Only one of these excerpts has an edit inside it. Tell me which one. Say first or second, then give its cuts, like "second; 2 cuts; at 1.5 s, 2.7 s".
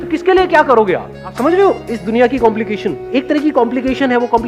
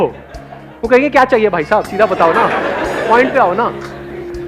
first; 2 cuts; at 1.4 s, 3.1 s